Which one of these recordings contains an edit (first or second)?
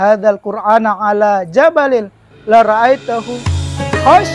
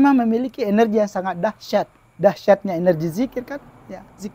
second